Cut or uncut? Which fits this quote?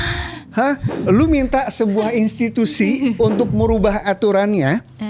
uncut